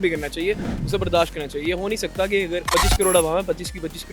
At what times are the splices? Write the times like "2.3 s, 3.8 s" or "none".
2.6 s